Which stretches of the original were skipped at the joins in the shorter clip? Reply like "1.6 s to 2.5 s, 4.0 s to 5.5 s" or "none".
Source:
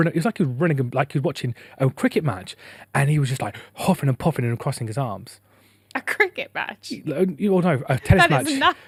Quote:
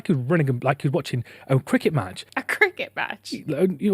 2.5 s to 5.8 s